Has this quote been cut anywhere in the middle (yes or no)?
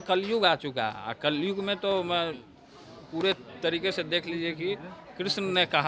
no